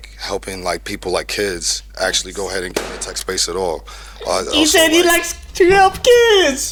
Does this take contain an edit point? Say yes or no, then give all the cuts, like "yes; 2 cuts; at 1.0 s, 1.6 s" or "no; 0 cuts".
no; 0 cuts